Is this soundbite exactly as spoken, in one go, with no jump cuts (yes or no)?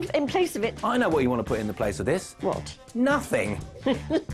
yes